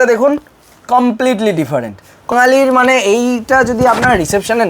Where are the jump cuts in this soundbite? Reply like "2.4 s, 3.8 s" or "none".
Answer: 2.3 s